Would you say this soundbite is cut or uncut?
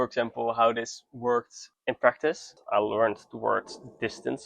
cut